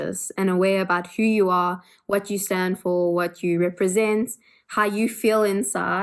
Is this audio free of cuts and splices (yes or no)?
yes